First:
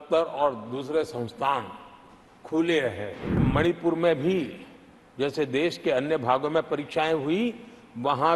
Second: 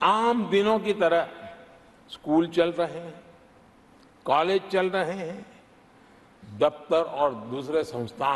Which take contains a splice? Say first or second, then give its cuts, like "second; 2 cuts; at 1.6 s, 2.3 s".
first; 1 cut; at 3.5 s